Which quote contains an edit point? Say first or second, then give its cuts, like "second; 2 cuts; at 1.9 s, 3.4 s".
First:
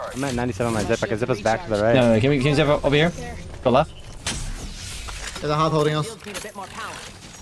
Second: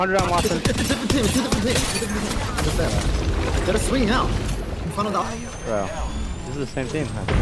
second; 1 cut; at 5.2 s